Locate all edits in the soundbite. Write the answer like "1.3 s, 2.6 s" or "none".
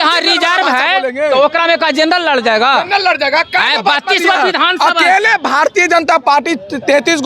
none